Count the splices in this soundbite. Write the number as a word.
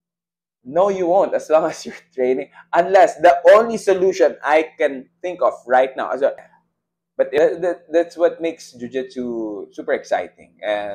one